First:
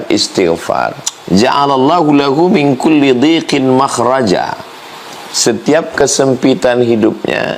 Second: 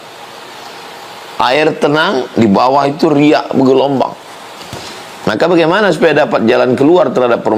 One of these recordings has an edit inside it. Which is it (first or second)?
first